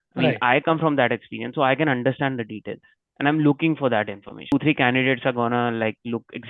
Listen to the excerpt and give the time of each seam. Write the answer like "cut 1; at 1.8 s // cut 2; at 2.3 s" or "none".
cut 1; at 4.5 s